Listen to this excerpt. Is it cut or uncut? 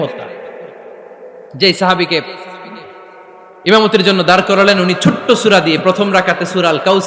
uncut